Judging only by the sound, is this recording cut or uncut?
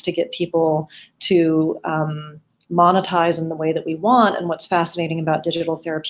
uncut